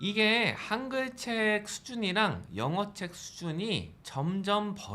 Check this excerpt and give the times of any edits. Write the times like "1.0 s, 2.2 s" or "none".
4.0 s